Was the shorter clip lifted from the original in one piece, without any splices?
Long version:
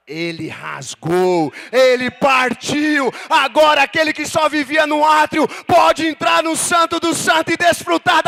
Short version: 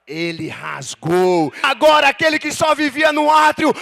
no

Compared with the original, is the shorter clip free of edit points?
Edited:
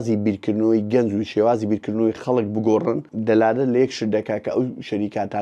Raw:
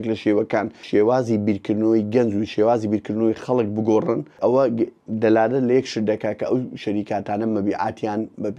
no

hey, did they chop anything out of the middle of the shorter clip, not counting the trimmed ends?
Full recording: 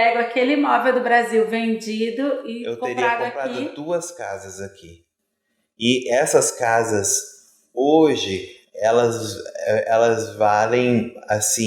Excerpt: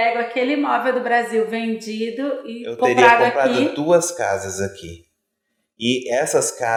no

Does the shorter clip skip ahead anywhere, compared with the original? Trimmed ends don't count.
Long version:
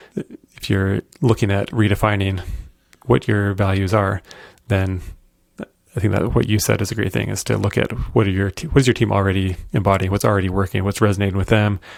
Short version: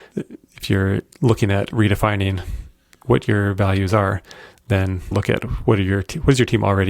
yes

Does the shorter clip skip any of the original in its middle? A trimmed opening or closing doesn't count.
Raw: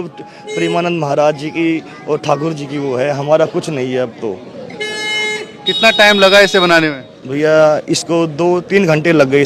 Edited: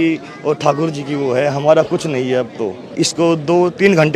yes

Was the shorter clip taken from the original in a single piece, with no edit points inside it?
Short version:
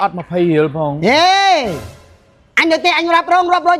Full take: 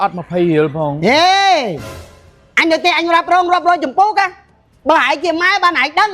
yes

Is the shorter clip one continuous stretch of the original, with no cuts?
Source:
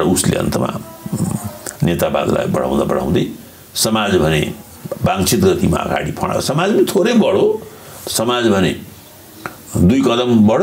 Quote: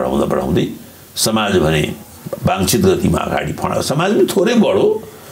yes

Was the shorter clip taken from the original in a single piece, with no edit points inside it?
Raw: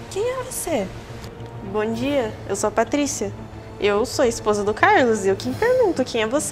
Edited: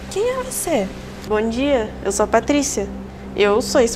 no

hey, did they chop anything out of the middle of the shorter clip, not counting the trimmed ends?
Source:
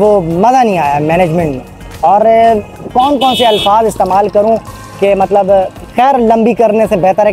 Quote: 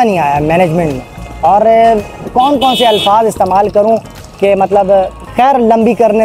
no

